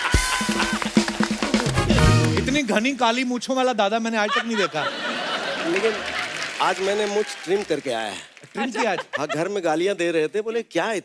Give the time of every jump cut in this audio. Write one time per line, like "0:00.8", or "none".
0:02.4